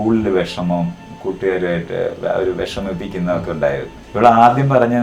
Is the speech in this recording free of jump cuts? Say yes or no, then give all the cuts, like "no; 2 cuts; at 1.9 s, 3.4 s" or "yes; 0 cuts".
no; 1 cut; at 4.0 s